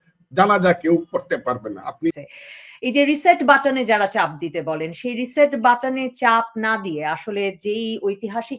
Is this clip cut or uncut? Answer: cut